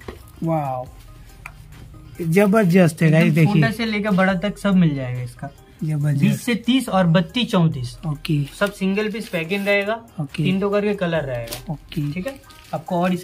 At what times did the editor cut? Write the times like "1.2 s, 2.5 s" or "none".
none

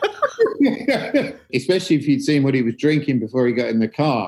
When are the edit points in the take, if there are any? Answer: 1.5 s

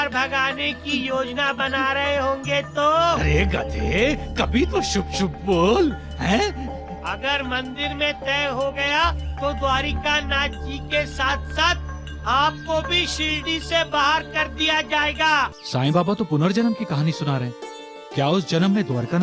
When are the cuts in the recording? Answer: 15.6 s

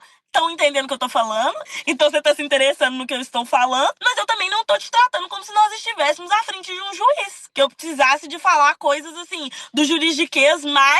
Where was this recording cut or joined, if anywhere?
1.6 s, 4.0 s

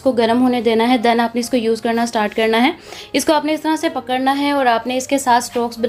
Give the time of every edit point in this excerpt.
none

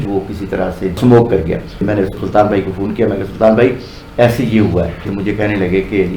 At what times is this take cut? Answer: 1.7 s, 5.1 s

